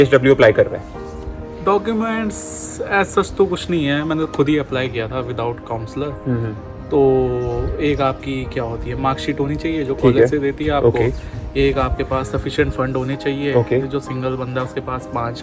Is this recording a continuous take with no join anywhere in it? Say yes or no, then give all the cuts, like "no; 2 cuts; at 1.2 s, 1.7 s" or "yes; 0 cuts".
yes; 0 cuts